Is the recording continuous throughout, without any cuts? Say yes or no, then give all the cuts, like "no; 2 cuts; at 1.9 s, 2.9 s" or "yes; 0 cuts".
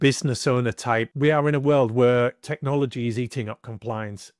no; 1 cut; at 1.1 s